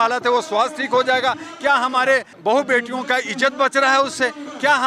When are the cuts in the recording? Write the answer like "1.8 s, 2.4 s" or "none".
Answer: 2.3 s